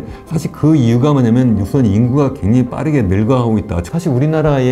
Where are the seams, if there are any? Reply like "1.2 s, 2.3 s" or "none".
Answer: 3.8 s